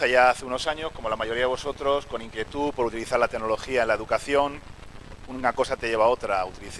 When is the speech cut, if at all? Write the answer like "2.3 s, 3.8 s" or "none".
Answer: 1.3 s

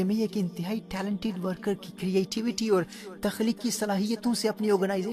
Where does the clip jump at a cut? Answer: none

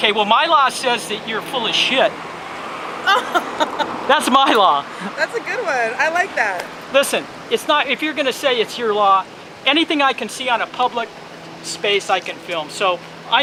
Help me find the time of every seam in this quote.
none

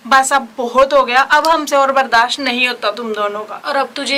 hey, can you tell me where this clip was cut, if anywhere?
none

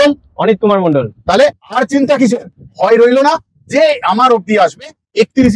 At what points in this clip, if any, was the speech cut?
none

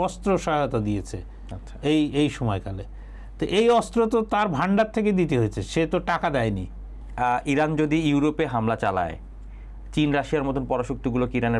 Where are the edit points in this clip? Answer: 7.0 s

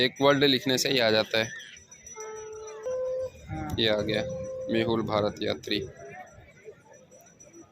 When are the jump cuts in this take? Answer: 2.9 s

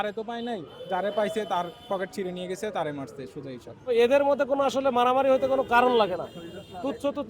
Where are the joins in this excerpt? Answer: 3.9 s

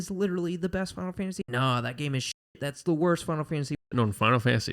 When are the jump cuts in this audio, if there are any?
1.4 s, 3.8 s

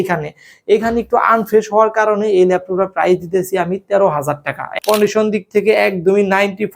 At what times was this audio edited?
4.6 s

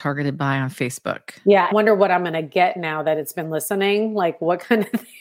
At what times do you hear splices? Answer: none

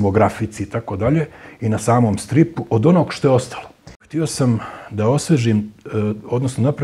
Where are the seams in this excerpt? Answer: 4.1 s

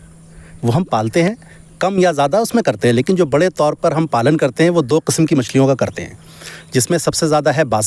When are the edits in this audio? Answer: none

